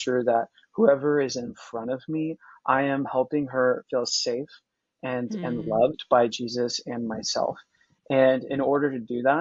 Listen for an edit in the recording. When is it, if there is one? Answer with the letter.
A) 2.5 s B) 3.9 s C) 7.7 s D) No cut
D